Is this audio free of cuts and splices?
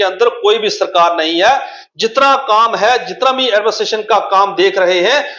yes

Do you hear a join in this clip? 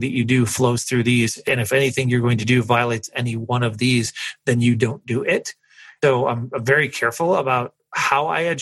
yes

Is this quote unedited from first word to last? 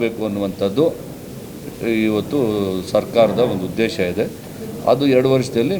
yes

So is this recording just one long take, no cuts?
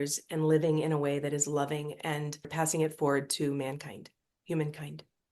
no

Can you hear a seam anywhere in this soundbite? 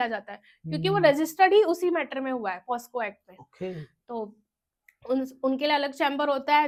no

